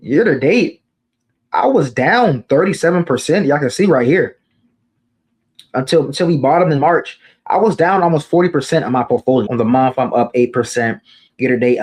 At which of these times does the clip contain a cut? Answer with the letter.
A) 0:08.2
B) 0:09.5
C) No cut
B